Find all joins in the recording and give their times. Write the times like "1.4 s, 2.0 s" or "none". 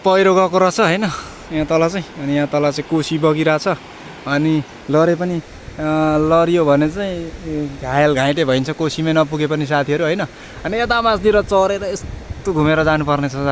none